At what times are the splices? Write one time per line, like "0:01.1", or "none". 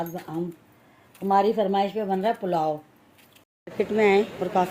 0:03.4